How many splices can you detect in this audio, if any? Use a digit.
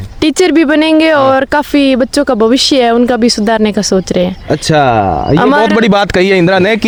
0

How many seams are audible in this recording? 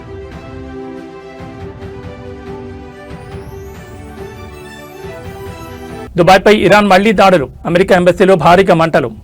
1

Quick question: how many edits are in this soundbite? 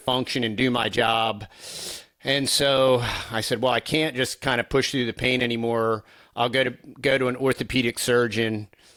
0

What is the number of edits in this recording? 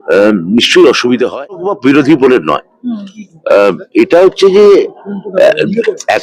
1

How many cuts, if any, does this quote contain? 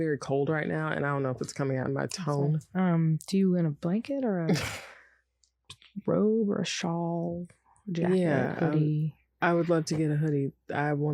1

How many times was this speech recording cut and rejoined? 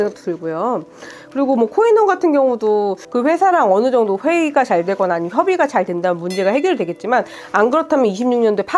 1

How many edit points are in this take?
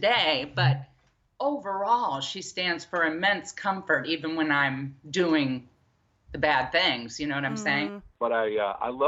1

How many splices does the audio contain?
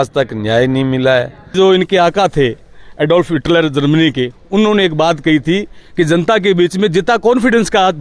1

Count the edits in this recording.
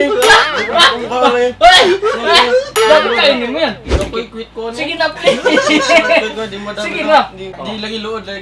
2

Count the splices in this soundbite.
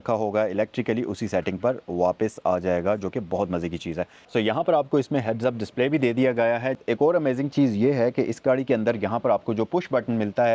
2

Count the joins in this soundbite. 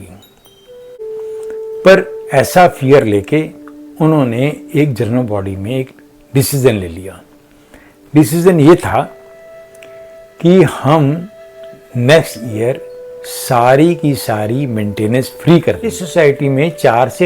2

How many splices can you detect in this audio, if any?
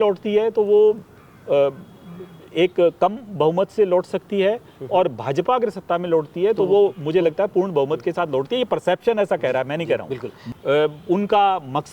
1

